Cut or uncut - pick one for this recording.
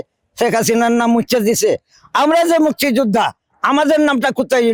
uncut